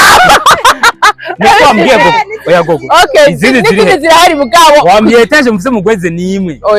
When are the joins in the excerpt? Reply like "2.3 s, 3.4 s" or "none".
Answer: none